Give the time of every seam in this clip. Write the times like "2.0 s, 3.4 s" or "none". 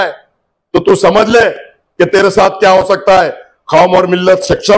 none